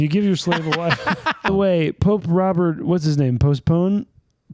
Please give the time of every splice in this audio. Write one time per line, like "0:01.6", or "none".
0:01.5